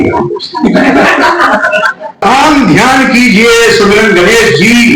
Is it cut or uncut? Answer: cut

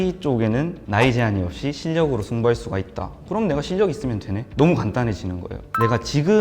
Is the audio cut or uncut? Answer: uncut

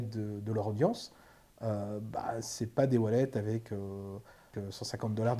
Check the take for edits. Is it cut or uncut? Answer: cut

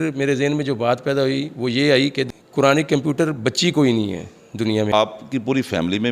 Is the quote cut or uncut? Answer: cut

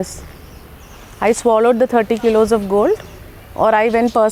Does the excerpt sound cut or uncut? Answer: uncut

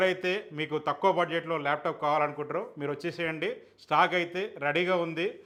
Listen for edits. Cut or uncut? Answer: uncut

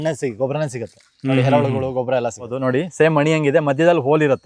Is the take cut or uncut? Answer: cut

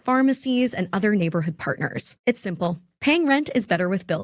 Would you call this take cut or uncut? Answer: cut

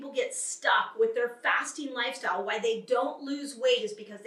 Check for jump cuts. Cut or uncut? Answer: uncut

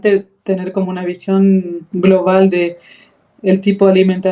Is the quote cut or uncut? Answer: uncut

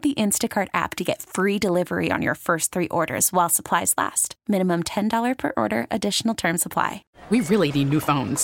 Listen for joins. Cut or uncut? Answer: cut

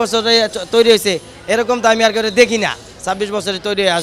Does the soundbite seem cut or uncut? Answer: uncut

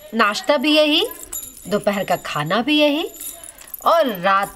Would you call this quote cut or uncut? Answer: uncut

